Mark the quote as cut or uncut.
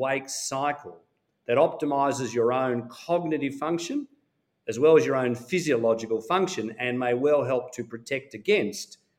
uncut